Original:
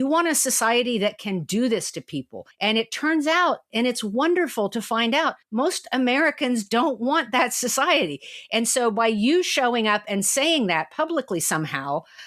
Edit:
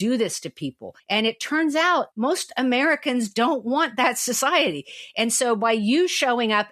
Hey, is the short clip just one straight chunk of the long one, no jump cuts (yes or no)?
no